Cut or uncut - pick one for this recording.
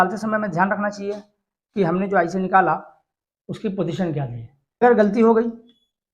cut